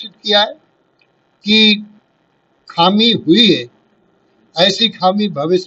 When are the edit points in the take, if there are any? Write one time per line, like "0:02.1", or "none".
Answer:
none